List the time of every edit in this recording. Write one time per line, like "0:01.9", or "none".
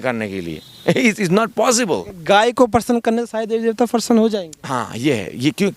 none